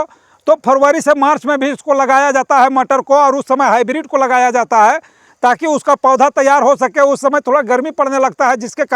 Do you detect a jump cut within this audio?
no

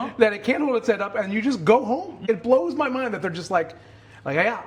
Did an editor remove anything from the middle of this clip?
yes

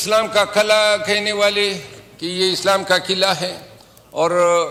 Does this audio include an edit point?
no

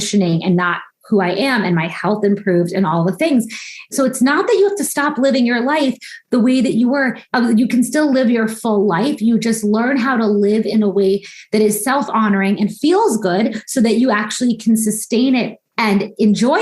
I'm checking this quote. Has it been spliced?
yes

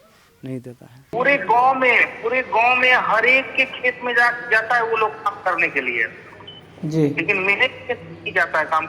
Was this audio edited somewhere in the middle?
yes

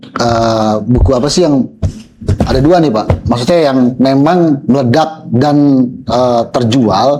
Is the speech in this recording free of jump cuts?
yes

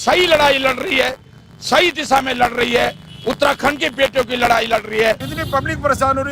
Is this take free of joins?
no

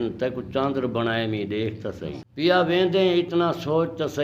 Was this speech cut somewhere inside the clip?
yes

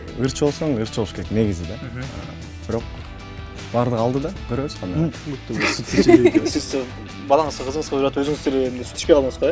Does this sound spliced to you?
yes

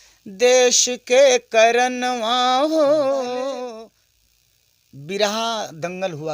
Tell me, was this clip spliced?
yes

